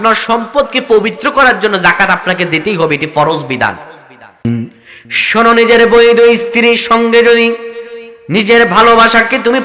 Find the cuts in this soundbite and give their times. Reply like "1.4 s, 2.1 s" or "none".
4.4 s